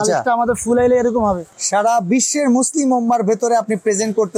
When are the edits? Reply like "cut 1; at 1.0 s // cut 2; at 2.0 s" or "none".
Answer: cut 1; at 1.5 s